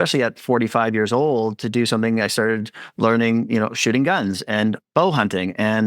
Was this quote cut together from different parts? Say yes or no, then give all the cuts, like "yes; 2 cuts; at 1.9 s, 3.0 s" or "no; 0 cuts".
yes; 1 cut; at 4.8 s